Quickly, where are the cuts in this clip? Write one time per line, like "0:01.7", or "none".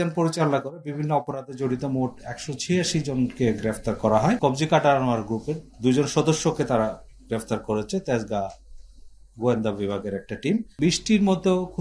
0:04.4
0:10.7